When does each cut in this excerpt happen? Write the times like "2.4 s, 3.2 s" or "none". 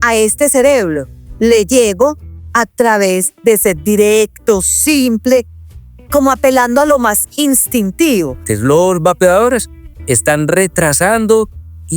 8.5 s

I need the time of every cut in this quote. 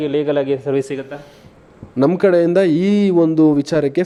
none

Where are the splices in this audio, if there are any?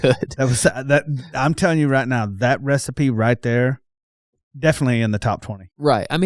none

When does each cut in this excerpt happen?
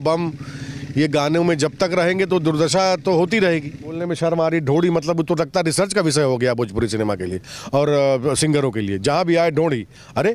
4.0 s

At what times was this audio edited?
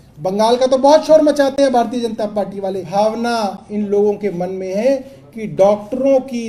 2.8 s

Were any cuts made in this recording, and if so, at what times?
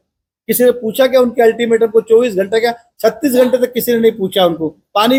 none

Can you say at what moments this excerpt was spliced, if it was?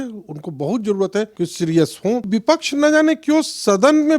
1.3 s, 2.3 s

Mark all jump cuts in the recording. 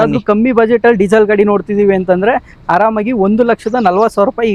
none

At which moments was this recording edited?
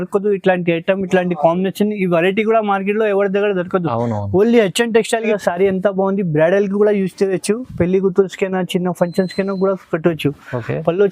5.3 s

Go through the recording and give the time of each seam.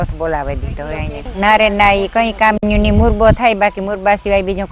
1.2 s

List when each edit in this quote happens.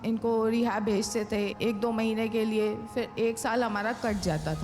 1.5 s

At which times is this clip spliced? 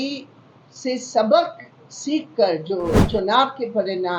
3.0 s

